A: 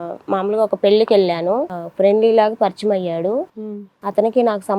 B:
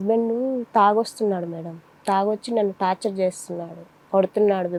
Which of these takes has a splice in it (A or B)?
A